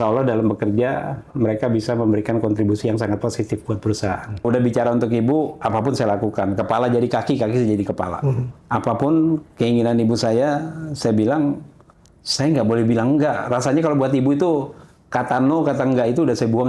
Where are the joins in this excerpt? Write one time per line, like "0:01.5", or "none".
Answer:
0:04.4
0:08.5